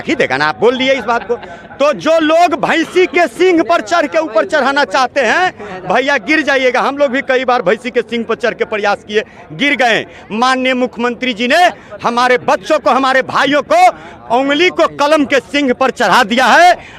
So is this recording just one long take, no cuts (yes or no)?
yes